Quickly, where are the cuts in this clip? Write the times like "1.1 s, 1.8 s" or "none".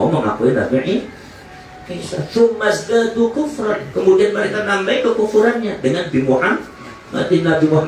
none